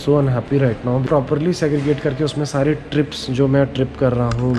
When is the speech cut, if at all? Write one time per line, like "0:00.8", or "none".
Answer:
0:01.1